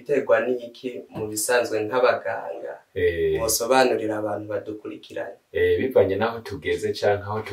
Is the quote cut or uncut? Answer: uncut